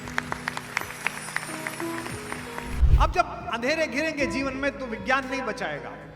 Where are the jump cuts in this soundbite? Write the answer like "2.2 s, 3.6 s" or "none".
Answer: 2.8 s